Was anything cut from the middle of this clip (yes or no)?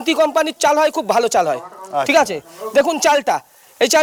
no